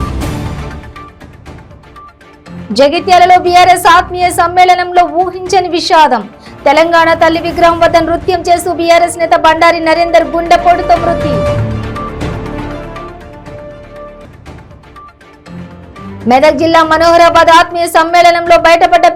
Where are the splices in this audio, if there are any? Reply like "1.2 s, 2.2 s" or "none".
2.2 s